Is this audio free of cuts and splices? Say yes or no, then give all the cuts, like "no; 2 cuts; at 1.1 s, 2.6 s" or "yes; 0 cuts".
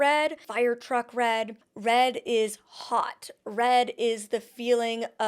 yes; 0 cuts